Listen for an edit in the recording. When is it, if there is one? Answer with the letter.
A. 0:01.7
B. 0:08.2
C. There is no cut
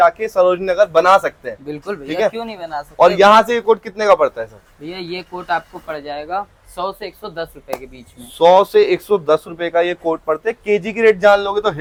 C